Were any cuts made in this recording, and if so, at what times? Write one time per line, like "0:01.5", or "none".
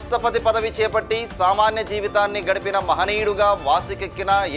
none

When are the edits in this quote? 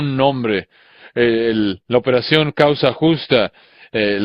none

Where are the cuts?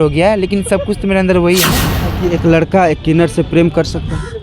0:02.2

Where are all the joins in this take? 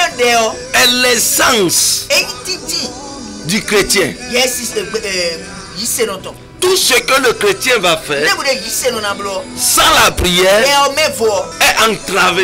0:09.6
0:11.5

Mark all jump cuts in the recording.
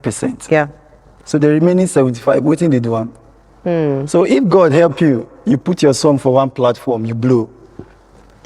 none

